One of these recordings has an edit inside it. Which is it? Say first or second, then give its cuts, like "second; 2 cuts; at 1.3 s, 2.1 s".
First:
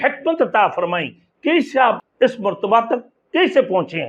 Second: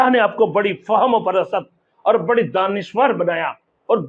first; 1 cut; at 2.0 s